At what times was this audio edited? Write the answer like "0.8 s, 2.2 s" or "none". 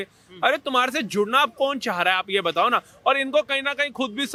none